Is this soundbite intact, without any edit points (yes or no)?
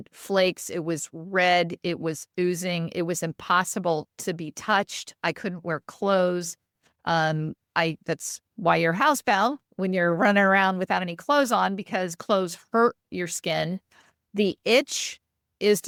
yes